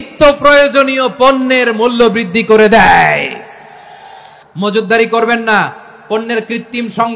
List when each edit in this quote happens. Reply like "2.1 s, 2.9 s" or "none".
4.3 s